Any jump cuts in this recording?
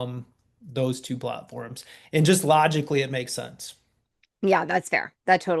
no; 0 cuts

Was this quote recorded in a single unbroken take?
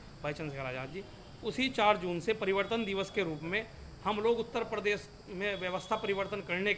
yes; 0 cuts

